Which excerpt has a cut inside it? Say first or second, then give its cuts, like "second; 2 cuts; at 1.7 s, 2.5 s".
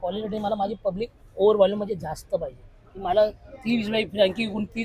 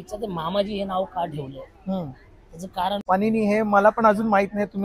second; 1 cut; at 3.0 s